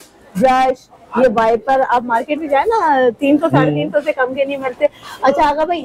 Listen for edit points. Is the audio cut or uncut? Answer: uncut